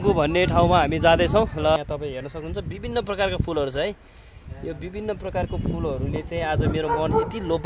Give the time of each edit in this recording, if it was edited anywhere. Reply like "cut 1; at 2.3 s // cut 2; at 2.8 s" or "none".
cut 1; at 1.8 s